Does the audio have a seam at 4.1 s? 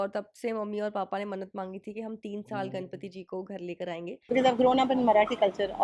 yes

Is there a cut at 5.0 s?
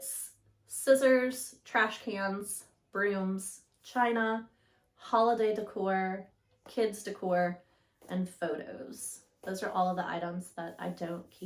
no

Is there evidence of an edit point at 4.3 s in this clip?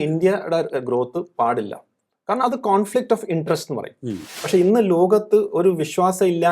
yes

